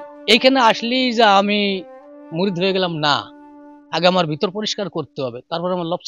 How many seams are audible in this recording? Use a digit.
0